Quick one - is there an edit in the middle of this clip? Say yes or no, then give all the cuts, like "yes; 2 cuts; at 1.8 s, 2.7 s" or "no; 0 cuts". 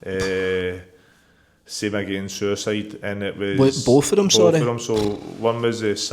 no; 0 cuts